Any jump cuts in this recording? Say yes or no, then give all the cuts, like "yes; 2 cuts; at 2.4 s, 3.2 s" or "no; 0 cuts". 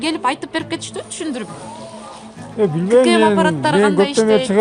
no; 0 cuts